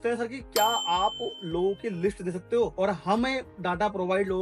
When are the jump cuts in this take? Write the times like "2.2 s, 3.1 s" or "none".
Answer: 2.7 s